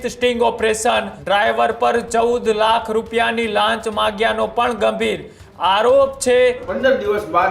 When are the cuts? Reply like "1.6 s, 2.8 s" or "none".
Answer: 1.1 s, 6.7 s